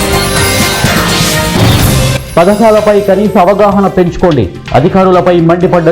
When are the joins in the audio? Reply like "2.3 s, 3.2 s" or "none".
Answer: 1.8 s